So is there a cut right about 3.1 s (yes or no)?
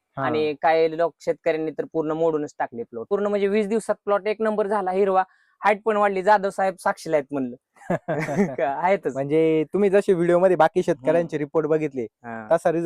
yes